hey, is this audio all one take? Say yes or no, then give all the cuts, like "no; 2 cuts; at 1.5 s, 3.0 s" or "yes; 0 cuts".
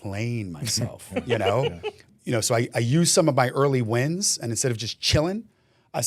no; 1 cut; at 2.0 s